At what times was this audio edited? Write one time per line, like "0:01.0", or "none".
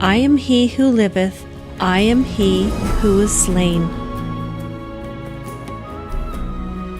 0:03.8